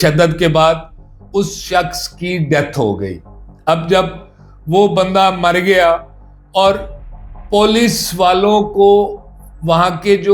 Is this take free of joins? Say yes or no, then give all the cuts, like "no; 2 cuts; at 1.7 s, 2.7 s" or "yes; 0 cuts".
yes; 0 cuts